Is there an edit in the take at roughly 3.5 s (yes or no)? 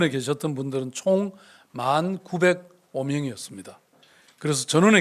no